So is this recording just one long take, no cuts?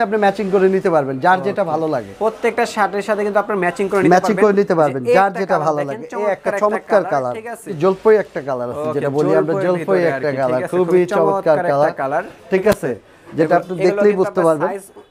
yes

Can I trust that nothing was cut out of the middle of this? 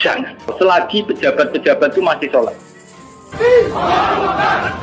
yes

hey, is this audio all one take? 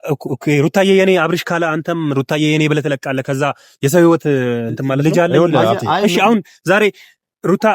no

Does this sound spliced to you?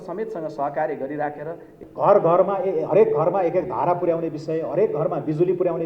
yes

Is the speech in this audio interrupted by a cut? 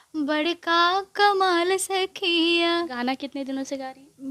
no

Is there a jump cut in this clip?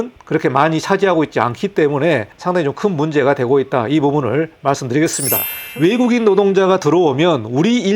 yes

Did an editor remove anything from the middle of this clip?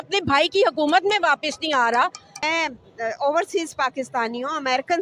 yes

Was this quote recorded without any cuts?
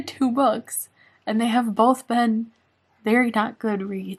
yes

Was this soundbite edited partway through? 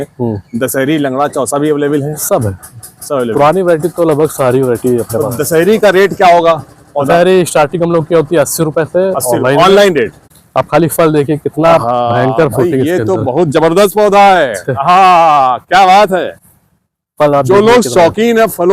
yes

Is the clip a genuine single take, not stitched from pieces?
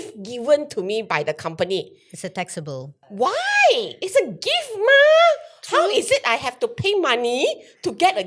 no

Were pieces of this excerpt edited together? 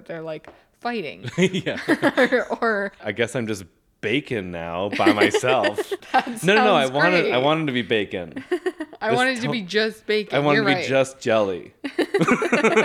yes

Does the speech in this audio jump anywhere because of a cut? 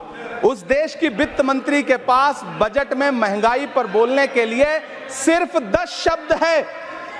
no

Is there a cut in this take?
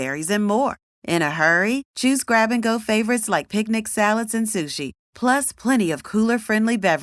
no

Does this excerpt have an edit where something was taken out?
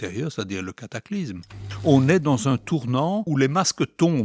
yes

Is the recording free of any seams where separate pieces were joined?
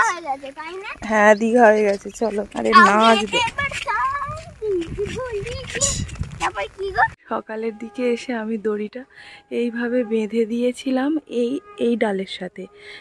no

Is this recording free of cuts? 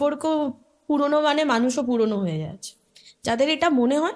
yes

